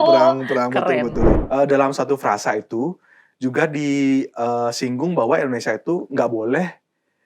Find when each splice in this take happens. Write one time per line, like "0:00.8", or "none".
0:01.4